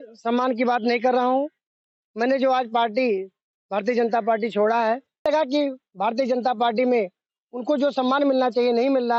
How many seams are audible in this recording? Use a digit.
1